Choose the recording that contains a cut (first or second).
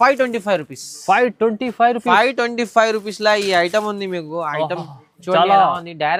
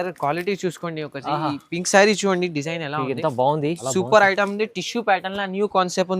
second